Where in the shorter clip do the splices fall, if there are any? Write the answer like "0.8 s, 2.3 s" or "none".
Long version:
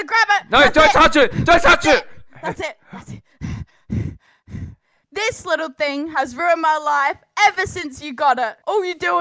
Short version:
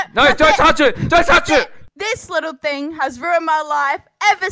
1.8 s